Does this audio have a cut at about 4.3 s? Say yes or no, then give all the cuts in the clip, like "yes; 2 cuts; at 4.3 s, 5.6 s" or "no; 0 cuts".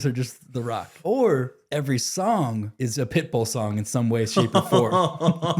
no; 3 cuts; at 0.9 s, 1.6 s, 2.7 s